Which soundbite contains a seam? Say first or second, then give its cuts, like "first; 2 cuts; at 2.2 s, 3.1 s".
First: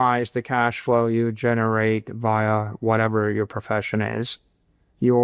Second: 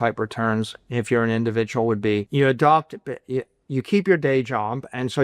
second; 1 cut; at 2.3 s